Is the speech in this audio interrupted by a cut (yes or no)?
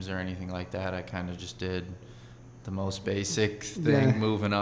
no